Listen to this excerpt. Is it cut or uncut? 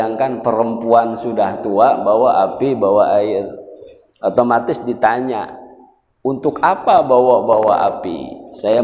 uncut